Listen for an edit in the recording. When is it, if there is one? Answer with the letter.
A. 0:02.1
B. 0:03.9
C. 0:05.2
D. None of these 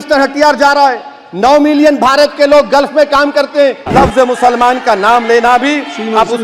B